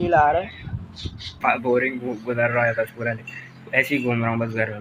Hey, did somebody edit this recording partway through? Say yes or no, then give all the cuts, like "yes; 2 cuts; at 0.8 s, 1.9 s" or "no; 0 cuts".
yes; 1 cut; at 1.4 s